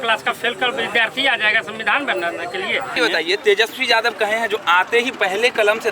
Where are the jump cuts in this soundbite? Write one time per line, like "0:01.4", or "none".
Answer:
0:02.9

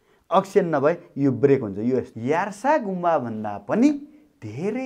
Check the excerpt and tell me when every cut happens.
0:02.1

